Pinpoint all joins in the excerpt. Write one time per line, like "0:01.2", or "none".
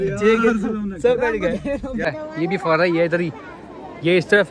0:02.1